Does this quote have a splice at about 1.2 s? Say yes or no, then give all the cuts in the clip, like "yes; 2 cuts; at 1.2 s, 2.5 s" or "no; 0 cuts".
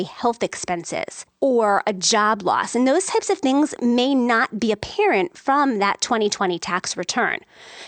yes; 1 cut; at 1.2 s